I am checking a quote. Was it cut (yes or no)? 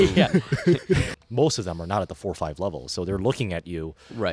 yes